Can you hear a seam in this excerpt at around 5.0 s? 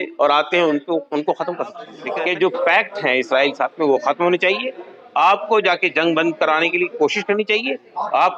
no; 1 cut; at 1.9 s

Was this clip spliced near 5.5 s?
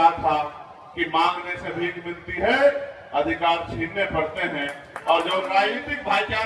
yes; 1 cut; at 5.5 s

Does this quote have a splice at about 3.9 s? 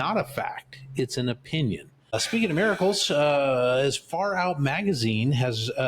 no; 1 cut; at 2.2 s

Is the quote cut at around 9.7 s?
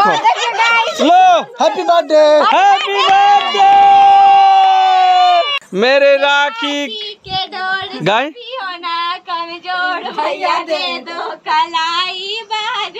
no; 1 cut; at 5.6 s

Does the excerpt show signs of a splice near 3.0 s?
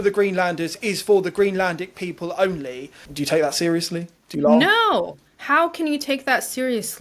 yes; 1 cut; at 3.0 s

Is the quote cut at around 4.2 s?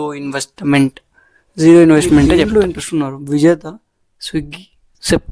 no; 1 cut; at 2.5 s

